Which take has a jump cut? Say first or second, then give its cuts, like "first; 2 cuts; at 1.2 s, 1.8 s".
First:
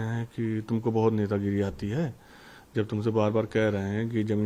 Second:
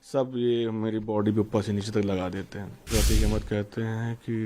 second; 1 cut; at 2.9 s